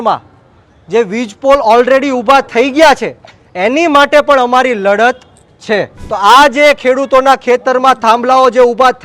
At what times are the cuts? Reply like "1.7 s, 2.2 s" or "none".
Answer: 6.0 s